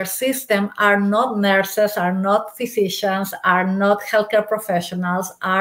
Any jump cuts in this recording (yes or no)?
no